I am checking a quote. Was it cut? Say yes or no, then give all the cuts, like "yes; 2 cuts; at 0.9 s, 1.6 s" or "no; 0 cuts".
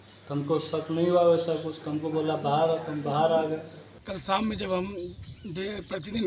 yes; 1 cut; at 4.2 s